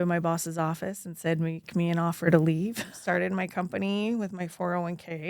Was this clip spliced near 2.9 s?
yes; 1 cut; at 2.9 s

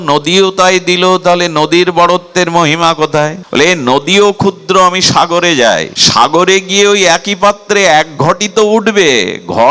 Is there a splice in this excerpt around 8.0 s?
no; 2 cuts; at 3.4 s, 6.0 s

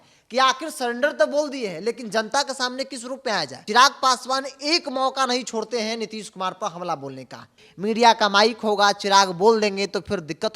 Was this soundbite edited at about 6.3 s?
no; 2 cuts; at 3.6 s, 7.6 s

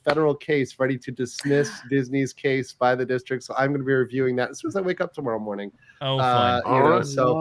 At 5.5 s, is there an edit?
no; 0 cuts

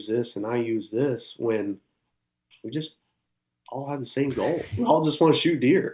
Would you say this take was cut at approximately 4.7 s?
yes; 1 cut; at 4.7 s

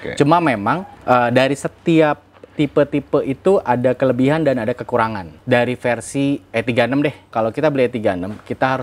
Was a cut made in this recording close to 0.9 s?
yes; 3 cuts; at 0.9 s, 5.3 s, 7.3 s

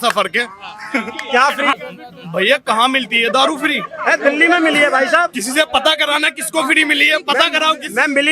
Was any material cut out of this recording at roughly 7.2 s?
no; 1 cut; at 1.8 s

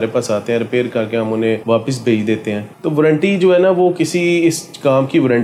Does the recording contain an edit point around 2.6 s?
no; 0 cuts

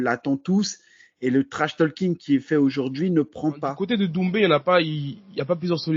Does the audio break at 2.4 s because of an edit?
no; 1 cut; at 3.7 s

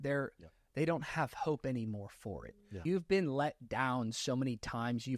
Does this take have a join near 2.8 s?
yes; 1 cut; at 2.8 s

